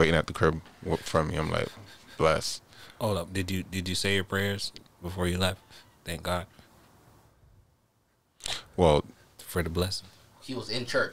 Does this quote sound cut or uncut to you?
uncut